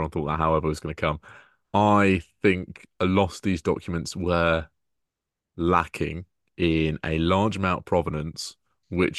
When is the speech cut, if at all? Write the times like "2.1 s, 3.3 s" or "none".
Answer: none